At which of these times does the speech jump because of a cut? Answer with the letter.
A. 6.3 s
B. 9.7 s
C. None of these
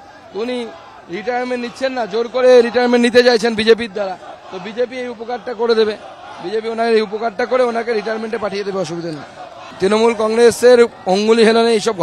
B